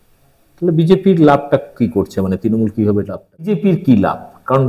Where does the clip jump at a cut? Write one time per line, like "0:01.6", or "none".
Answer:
0:03.6